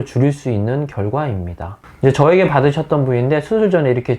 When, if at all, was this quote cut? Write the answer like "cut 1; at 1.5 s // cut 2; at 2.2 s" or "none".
cut 1; at 1.7 s